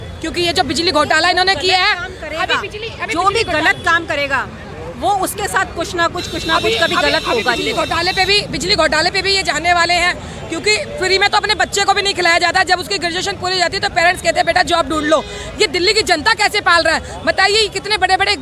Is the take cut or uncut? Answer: uncut